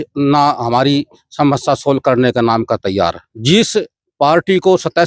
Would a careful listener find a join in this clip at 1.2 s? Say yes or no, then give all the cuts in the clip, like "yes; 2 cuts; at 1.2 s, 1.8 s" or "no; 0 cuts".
no; 1 cut; at 3.3 s